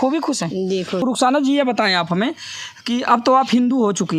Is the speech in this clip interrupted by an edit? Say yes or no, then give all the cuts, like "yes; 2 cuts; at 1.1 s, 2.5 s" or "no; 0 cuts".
yes; 1 cut; at 1.0 s